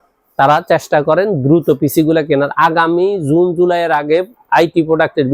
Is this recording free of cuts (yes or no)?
yes